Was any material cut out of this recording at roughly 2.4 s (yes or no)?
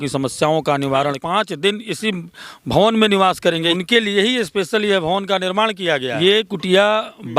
no